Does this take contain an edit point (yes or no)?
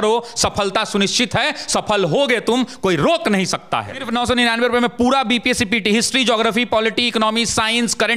yes